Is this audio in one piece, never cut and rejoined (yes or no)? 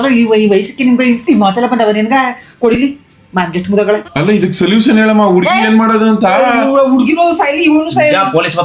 no